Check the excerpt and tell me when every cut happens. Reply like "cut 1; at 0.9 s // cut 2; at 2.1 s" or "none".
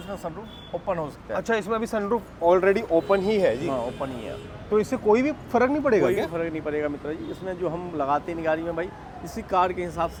none